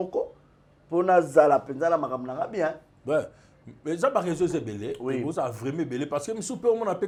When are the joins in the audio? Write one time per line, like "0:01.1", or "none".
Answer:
none